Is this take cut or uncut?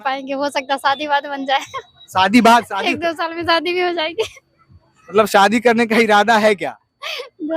uncut